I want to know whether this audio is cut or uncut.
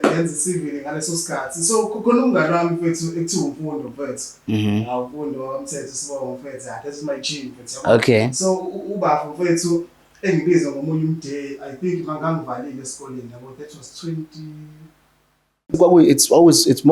cut